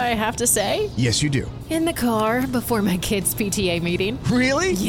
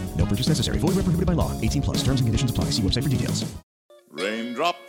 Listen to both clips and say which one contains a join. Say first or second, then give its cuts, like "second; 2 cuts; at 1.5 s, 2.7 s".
second; 1 cut; at 3.7 s